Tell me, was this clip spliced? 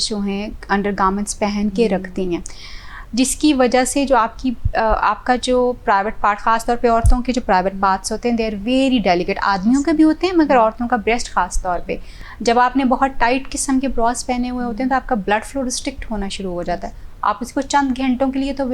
no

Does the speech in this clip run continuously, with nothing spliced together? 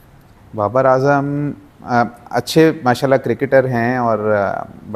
yes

